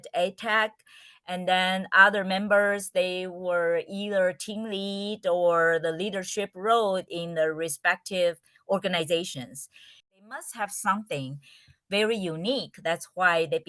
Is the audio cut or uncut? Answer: cut